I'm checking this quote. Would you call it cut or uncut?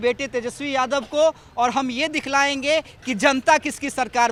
uncut